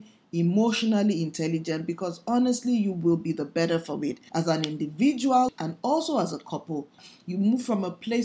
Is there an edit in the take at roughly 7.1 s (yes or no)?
yes